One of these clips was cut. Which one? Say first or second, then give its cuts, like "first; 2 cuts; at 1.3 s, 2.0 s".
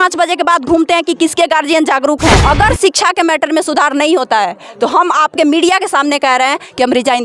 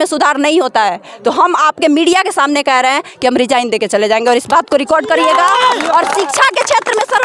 first; 1 cut; at 2.4 s